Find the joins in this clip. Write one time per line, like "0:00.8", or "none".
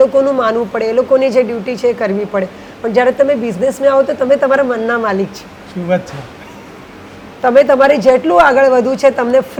none